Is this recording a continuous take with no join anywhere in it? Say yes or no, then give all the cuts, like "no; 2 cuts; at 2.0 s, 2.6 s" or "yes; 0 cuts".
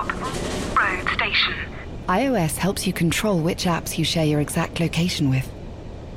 yes; 0 cuts